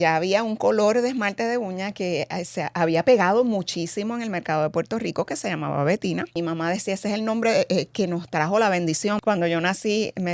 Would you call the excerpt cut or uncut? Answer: cut